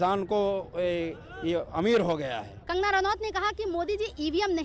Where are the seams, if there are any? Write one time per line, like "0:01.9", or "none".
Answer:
0:02.6